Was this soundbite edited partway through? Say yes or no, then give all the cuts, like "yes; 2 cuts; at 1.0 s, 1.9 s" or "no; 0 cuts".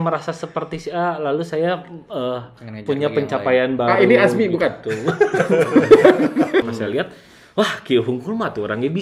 yes; 1 cut; at 6.7 s